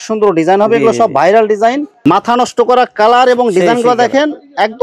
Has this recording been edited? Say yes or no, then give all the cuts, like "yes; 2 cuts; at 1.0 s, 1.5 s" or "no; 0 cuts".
yes; 1 cut; at 2.0 s